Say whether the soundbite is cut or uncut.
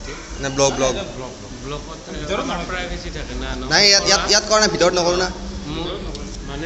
uncut